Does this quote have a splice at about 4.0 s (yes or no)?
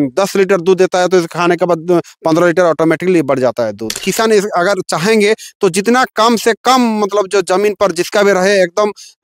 yes